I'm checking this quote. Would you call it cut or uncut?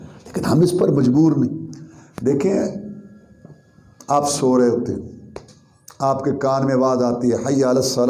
uncut